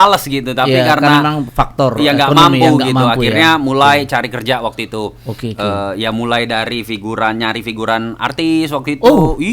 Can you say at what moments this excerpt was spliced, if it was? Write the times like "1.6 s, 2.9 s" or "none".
none